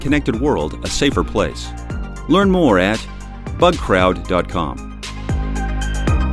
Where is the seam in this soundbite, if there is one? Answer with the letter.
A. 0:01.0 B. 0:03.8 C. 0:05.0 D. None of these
C